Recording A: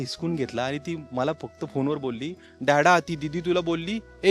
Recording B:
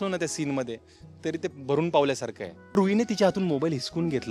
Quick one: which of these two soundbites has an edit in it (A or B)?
B